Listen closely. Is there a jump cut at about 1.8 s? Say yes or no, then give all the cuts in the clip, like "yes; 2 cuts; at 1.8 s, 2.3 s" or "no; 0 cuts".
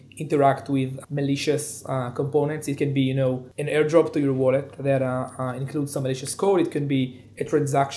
no; 0 cuts